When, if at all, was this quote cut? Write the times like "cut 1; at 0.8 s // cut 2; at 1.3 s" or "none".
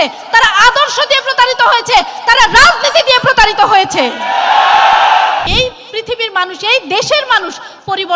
cut 1; at 5.5 s